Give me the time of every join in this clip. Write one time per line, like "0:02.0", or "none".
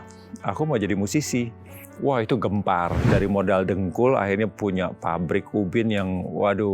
0:03.0